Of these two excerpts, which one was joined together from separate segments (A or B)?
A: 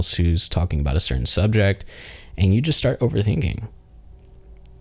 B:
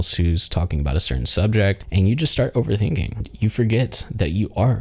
B